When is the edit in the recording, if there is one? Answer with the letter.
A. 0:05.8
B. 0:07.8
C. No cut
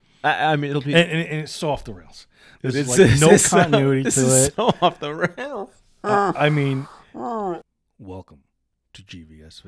B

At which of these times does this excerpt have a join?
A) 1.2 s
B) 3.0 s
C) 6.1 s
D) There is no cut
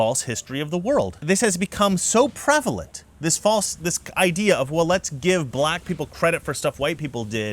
A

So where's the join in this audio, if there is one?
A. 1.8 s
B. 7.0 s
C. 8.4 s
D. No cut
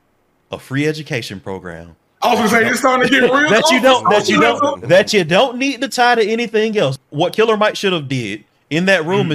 B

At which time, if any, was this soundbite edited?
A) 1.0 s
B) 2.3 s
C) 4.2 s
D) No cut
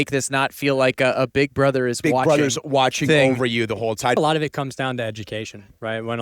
C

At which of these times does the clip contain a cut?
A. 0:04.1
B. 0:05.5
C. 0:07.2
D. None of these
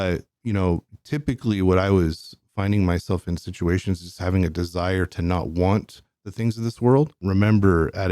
C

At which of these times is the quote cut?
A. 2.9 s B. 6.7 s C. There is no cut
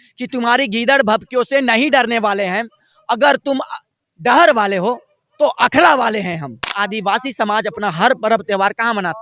B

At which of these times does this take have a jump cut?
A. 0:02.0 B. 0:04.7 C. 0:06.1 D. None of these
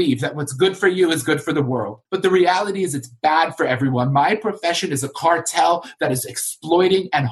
A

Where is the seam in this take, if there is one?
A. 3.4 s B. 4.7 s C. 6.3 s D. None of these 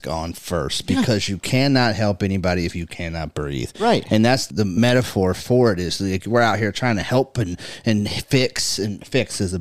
B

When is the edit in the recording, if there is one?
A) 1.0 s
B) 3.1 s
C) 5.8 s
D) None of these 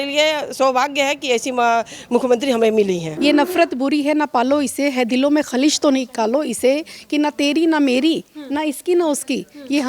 B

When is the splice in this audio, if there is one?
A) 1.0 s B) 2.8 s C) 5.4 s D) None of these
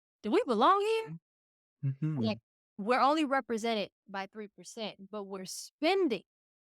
B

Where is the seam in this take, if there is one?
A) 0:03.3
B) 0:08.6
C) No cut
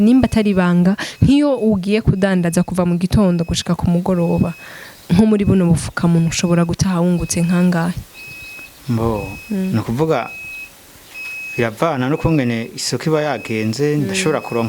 C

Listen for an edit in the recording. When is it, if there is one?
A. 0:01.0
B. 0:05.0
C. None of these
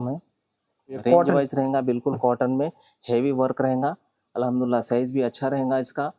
A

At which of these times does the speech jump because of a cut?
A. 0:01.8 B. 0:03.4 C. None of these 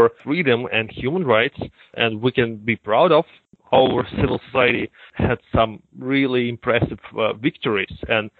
B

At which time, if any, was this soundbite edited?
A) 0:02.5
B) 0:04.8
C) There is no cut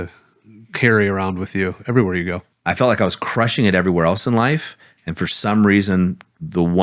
A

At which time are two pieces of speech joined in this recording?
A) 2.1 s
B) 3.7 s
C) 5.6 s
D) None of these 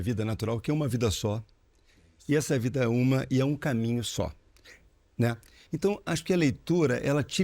C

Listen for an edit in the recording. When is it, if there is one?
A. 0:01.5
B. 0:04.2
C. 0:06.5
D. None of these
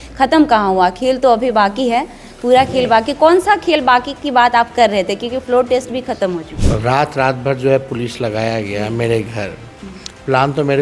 C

